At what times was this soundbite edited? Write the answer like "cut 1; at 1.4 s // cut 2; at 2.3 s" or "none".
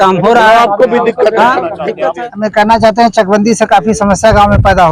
cut 1; at 1.9 s